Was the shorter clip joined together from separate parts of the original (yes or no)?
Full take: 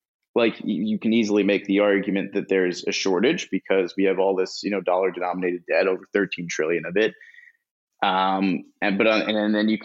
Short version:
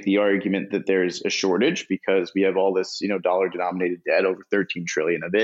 no